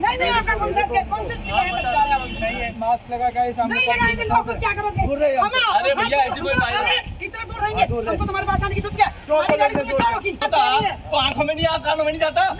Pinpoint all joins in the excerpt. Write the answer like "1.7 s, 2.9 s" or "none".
10.4 s